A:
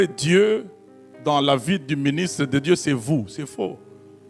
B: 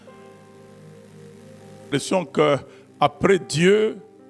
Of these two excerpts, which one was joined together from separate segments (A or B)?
B